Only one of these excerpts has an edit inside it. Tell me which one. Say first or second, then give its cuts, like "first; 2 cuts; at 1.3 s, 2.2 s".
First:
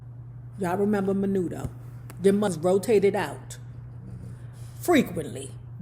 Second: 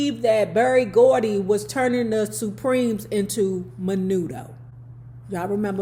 first; 1 cut; at 2.5 s